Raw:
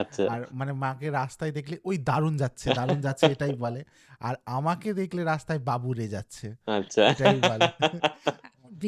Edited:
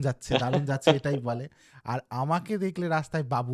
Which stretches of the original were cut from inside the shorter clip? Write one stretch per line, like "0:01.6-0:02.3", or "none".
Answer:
none